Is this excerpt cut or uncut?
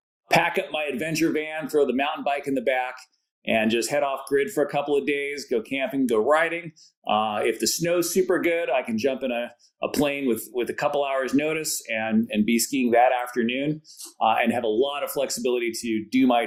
uncut